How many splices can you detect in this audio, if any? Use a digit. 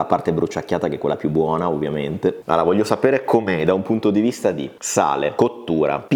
0